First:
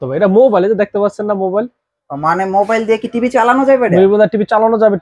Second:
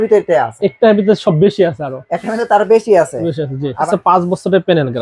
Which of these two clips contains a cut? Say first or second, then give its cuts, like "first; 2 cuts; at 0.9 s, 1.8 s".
second; 1 cut; at 3.8 s